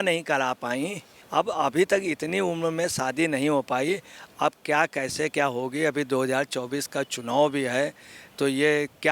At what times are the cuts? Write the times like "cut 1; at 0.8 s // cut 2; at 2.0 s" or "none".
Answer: cut 1; at 1.2 s

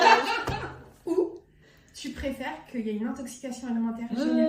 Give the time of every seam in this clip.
cut 1; at 0.9 s

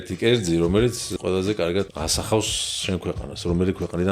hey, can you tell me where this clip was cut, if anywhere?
cut 1; at 1.1 s // cut 2; at 1.9 s

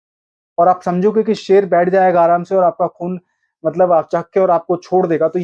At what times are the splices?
none

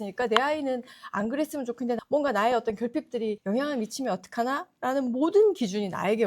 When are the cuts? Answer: cut 1; at 2.0 s

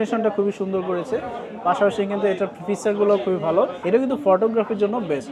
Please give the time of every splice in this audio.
cut 1; at 3.8 s

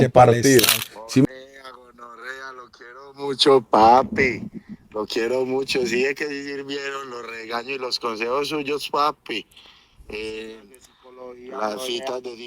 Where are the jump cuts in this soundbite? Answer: cut 1; at 1.2 s

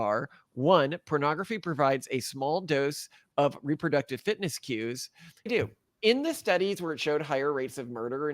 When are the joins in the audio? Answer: cut 1; at 5.5 s

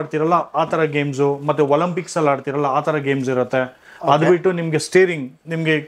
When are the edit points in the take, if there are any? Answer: none

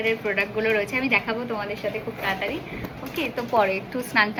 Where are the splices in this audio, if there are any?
none

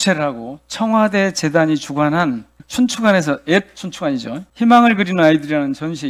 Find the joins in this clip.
cut 1; at 2.6 s // cut 2; at 4.4 s

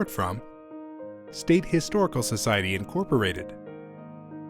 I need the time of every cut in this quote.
cut 1; at 3.4 s

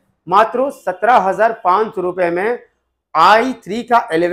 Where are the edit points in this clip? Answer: none

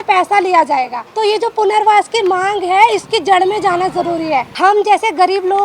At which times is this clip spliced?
cut 1; at 1.0 s // cut 2; at 4.5 s

